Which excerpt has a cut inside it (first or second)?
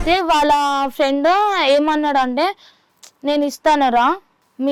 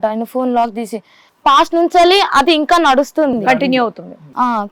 second